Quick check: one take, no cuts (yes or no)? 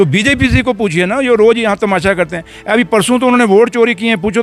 yes